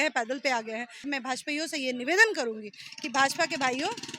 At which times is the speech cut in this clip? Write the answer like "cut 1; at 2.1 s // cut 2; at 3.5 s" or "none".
cut 1; at 1.1 s

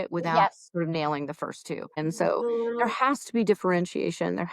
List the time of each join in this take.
cut 1; at 2.0 s

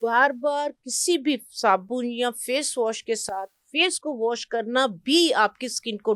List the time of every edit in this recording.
none

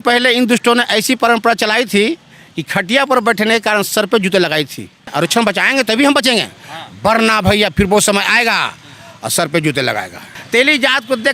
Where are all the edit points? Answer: cut 1; at 5.1 s // cut 2; at 10.3 s

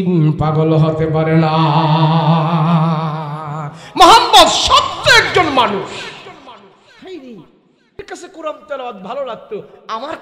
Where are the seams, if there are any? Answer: cut 1; at 8.0 s

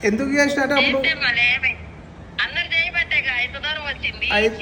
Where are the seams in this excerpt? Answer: none

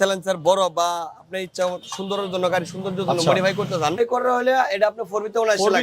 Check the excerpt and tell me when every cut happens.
cut 1; at 4.0 s

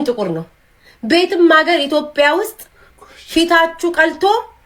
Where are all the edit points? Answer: none

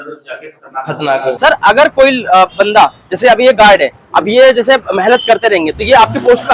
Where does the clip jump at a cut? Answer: cut 1; at 1.4 s

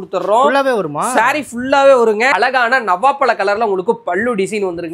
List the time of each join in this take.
cut 1; at 2.3 s

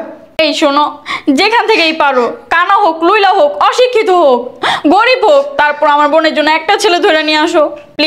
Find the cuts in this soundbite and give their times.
none

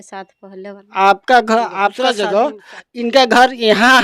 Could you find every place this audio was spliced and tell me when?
cut 1; at 2.0 s

